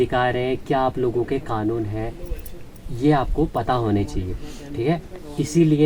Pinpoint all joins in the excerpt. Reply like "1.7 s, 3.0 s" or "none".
none